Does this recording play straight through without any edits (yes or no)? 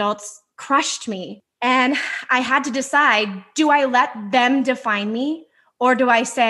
no